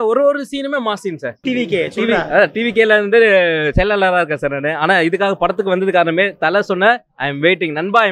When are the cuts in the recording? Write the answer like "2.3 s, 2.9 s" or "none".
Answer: 1.3 s